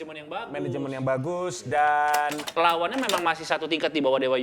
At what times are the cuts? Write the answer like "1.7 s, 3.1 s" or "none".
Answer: 2.4 s